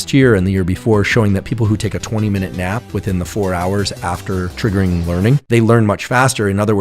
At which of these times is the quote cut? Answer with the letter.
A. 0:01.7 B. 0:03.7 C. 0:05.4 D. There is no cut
C